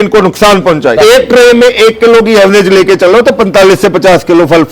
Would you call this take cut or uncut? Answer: cut